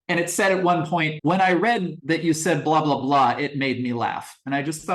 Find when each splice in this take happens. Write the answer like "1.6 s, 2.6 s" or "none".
1.1 s, 1.9 s